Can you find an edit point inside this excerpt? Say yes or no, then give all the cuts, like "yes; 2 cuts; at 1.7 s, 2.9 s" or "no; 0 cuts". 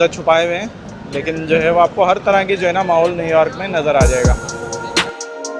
no; 0 cuts